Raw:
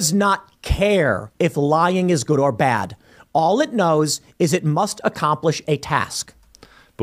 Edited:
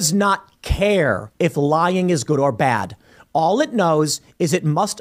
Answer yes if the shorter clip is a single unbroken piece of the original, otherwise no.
yes